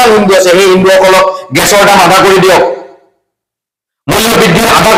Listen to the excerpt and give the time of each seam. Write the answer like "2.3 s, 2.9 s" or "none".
none